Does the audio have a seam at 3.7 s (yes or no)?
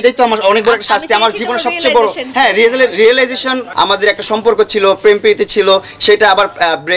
yes